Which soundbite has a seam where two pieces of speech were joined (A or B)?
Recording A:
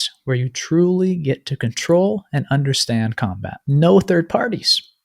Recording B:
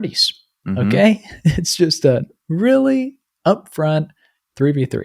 A